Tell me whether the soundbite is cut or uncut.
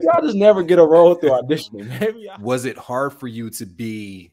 cut